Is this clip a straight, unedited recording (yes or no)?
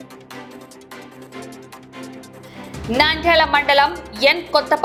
yes